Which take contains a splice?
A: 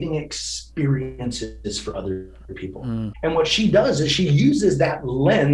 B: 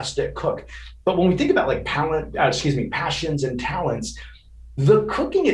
A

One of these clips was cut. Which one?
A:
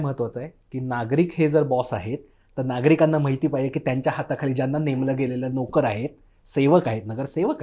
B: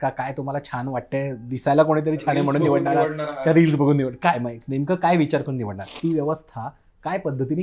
B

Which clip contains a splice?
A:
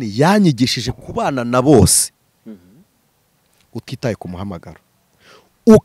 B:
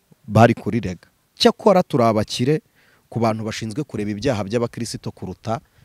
B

